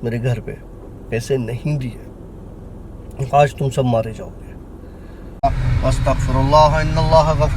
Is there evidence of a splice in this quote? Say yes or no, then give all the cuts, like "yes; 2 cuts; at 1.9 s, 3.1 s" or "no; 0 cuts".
yes; 1 cut; at 5.4 s